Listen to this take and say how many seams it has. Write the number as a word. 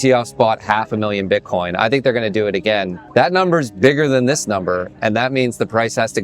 one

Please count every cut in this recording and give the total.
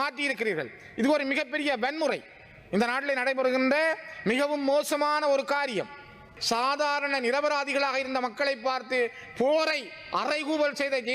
one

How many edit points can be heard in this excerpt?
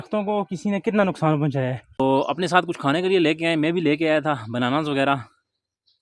one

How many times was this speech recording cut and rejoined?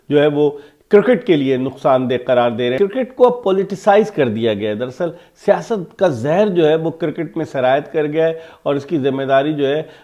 one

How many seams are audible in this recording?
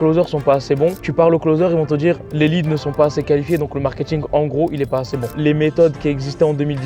one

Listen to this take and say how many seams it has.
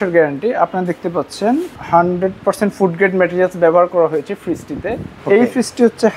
two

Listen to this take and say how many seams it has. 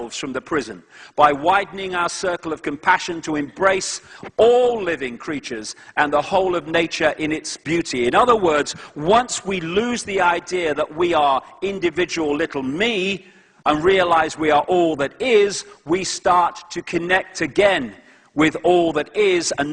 one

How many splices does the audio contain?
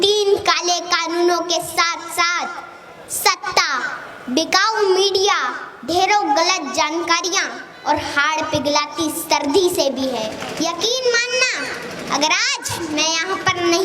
one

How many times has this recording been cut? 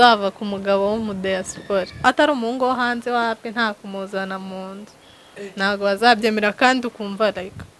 one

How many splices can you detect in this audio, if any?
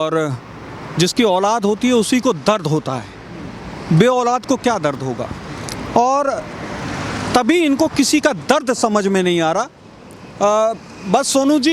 zero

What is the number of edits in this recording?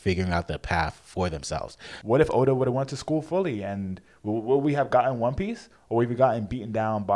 one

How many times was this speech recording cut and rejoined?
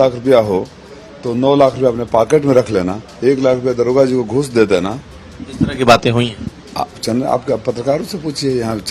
zero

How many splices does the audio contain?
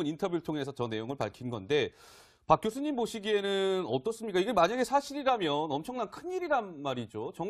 one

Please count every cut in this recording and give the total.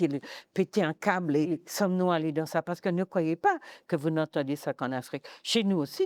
one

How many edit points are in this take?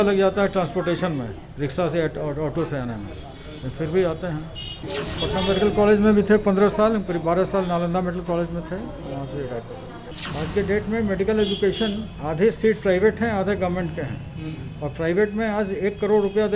two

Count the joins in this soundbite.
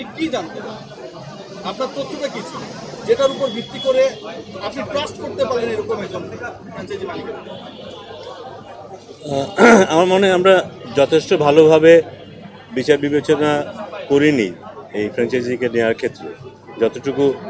zero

